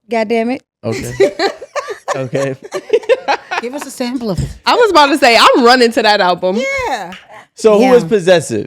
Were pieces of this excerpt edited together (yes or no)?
no